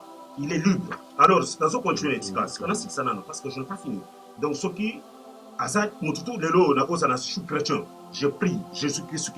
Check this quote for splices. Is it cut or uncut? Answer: uncut